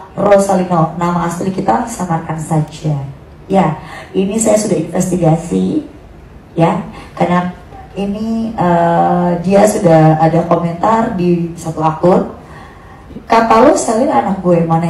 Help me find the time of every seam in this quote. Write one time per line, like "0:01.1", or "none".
none